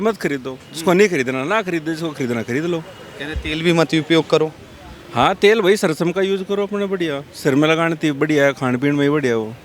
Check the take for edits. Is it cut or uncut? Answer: uncut